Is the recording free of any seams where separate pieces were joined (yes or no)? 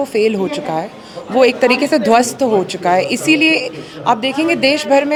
yes